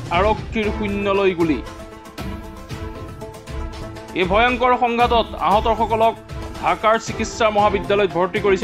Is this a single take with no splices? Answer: yes; 0 cuts

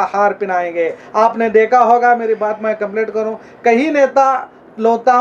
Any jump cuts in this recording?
no; 0 cuts

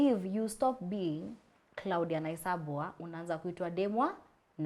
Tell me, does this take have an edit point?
no; 0 cuts

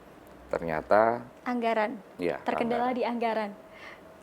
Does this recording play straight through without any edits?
no; 1 cut; at 1.3 s

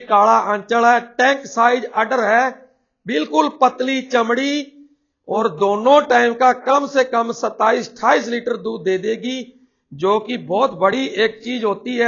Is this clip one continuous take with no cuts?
yes; 0 cuts

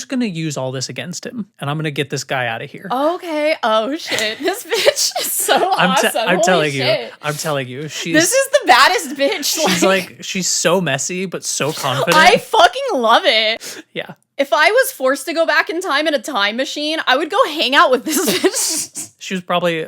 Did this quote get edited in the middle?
no; 0 cuts

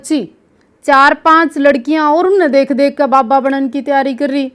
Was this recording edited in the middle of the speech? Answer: no; 0 cuts

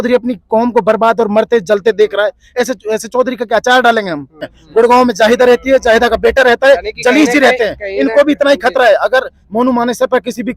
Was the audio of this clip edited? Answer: yes; 1 cut; at 4.5 s

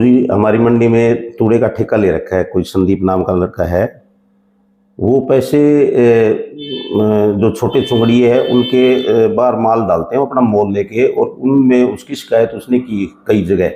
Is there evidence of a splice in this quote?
no; 0 cuts

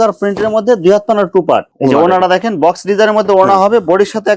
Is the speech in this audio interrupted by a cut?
no; 0 cuts

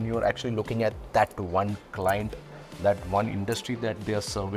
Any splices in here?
no; 0 cuts

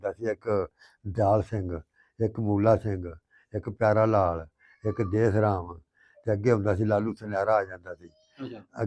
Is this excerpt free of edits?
yes; 0 cuts

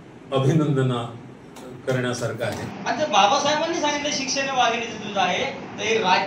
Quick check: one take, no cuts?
no; 1 cut; at 2.7 s

